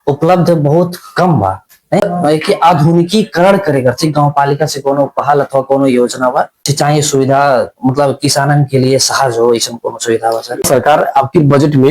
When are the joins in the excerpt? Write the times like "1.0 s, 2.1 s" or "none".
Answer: 2.0 s, 6.7 s, 10.6 s